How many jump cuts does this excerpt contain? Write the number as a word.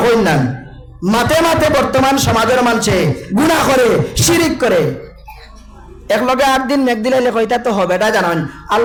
zero